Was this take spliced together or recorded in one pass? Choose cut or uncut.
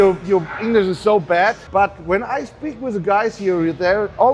cut